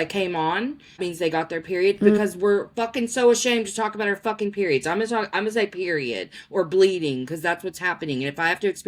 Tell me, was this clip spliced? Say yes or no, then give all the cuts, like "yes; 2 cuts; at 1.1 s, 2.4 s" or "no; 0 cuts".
yes; 1 cut; at 1.0 s